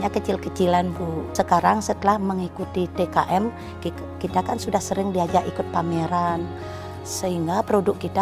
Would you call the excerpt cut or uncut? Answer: cut